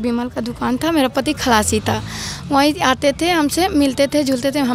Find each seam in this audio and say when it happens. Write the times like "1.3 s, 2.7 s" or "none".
none